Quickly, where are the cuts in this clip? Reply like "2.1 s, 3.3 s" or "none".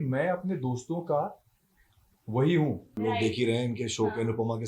2.9 s